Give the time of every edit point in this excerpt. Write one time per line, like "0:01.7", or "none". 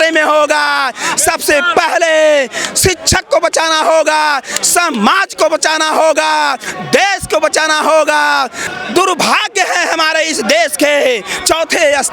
0:08.6